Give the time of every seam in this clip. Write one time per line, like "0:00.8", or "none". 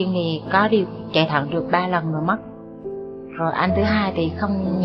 none